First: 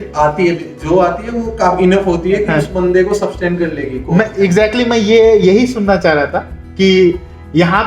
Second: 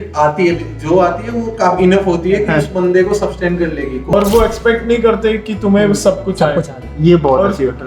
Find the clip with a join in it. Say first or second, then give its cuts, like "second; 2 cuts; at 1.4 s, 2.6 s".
second; 1 cut; at 4.1 s